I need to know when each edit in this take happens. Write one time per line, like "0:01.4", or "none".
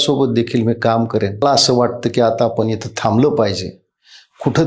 0:01.4